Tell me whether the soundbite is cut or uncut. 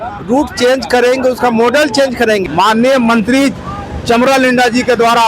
cut